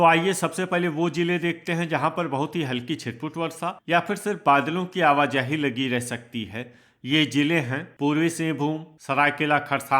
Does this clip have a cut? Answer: yes; 2 cuts; at 7.9 s, 8.9 s

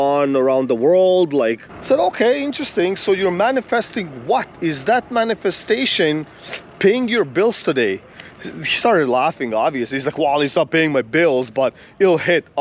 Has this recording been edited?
yes; 1 cut; at 1.7 s

